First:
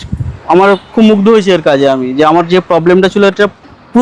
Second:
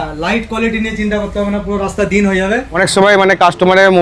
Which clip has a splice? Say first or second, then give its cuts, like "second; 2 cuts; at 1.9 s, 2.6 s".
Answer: second; 1 cut; at 2.9 s